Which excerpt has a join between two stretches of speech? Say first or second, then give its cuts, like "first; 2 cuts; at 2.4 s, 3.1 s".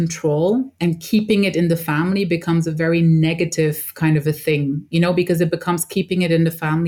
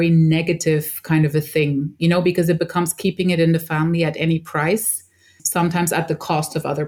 second; 1 cut; at 5.4 s